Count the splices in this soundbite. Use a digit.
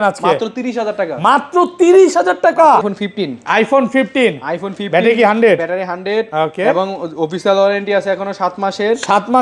1